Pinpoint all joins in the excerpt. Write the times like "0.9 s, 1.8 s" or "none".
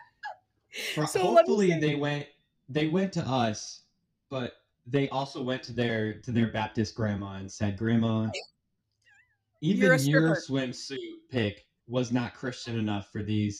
none